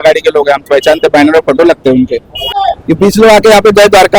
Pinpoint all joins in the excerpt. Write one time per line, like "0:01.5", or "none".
0:02.7